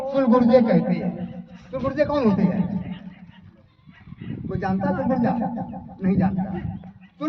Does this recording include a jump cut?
no; 0 cuts

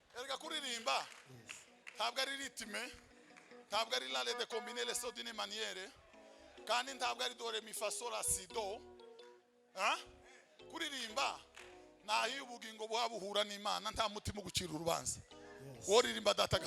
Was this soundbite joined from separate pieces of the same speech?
no; 0 cuts

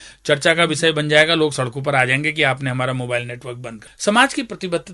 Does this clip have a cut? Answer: yes; 1 cut; at 3.8 s

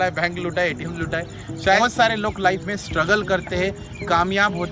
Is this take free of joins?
no; 1 cut; at 1.8 s

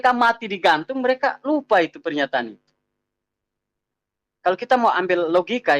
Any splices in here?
no; 0 cuts

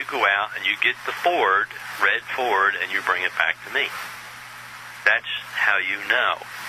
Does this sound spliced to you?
yes; 1 cut; at 1.8 s

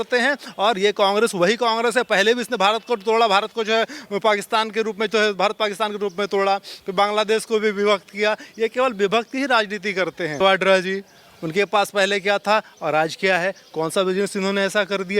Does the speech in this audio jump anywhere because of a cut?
yes; 1 cut; at 10.4 s

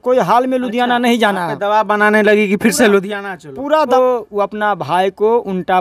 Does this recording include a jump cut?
yes; 1 cut; at 3.9 s

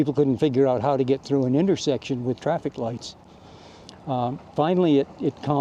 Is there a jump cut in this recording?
no; 0 cuts

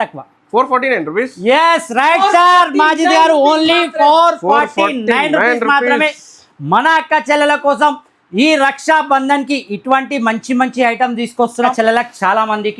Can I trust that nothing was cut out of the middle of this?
no; 1 cut; at 11.7 s

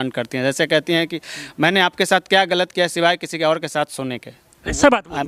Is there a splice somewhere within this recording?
no; 0 cuts

